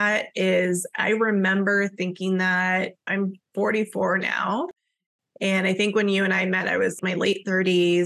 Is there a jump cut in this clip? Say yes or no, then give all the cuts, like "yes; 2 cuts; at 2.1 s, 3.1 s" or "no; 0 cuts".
yes; 2 cuts; at 3.0 s, 7.0 s